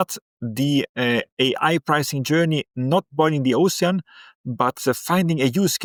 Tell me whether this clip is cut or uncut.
uncut